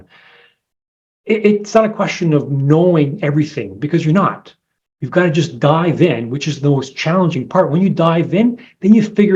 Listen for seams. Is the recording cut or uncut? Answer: uncut